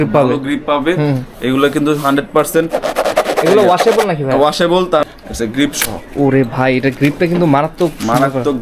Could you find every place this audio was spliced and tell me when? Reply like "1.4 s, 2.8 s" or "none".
5.0 s